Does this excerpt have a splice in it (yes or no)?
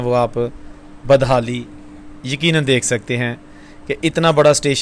no